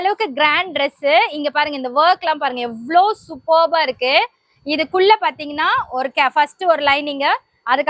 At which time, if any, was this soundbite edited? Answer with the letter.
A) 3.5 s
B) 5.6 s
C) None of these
C